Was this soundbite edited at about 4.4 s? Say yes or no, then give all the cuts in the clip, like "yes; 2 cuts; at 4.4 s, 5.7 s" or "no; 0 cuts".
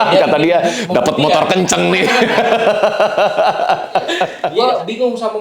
yes; 1 cut; at 4.4 s